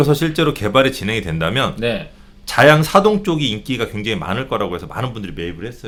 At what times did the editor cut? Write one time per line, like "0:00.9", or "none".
none

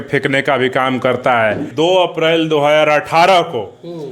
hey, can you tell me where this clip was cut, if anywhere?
0:01.7

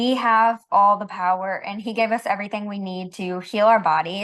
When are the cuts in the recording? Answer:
none

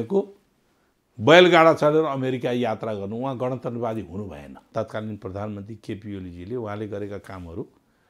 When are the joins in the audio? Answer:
0:04.7

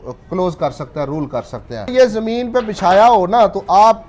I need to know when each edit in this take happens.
none

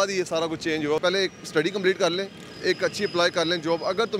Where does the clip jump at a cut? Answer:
0:01.0

